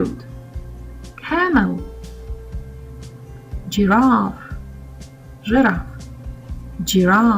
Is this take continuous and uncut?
yes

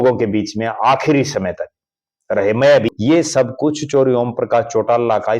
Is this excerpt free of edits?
no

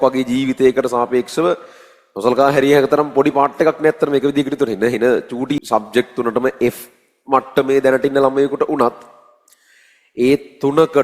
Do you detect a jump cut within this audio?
yes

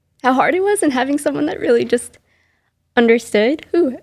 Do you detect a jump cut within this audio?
no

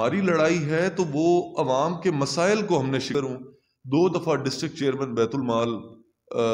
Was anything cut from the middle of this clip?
yes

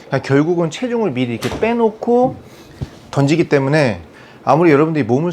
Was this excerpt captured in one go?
yes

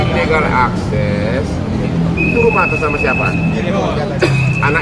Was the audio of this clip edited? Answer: no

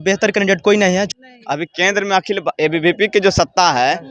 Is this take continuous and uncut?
no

